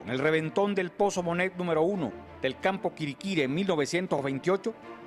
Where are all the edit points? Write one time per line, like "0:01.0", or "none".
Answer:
0:04.0